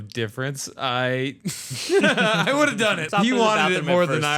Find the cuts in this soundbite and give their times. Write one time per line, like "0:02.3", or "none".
0:03.0